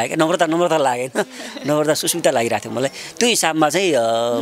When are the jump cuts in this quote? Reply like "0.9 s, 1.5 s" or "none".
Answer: none